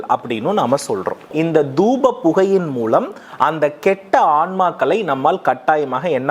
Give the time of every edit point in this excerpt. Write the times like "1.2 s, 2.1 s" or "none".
1.3 s